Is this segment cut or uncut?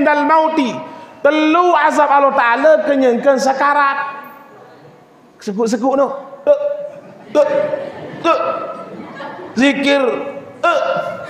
uncut